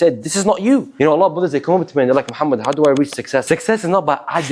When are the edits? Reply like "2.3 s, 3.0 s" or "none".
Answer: 0.9 s, 3.4 s